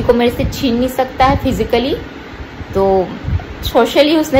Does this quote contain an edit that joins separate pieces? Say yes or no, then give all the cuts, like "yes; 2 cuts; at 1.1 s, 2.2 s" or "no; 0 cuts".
no; 0 cuts